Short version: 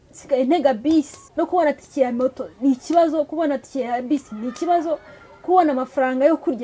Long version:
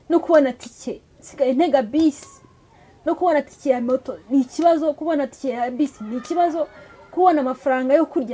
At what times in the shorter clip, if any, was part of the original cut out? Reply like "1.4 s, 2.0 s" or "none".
1.2 s